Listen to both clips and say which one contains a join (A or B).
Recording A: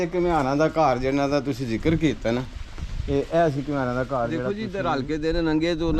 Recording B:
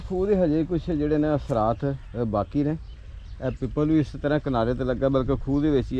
A